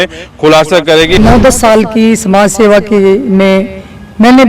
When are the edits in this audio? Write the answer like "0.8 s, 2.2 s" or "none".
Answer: 1.2 s